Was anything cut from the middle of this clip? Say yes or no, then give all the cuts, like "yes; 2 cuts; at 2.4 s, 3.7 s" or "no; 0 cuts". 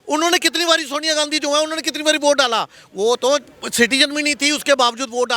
no; 0 cuts